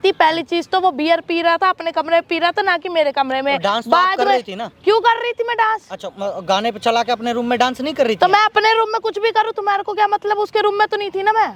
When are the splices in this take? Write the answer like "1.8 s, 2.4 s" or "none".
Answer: none